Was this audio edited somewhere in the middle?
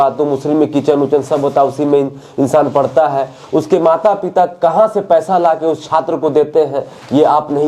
no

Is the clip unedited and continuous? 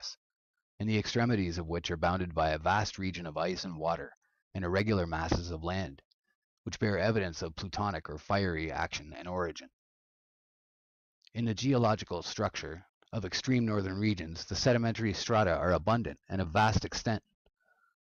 yes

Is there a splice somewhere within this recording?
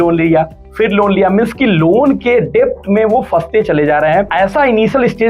yes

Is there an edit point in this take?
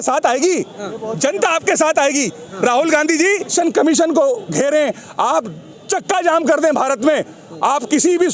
yes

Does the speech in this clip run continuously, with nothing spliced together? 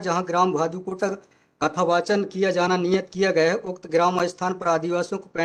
yes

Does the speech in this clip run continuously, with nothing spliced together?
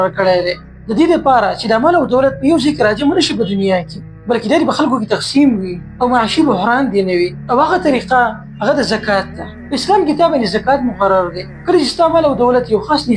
yes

